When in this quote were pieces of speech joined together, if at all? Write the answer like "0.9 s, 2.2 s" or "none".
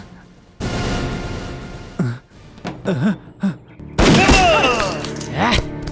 none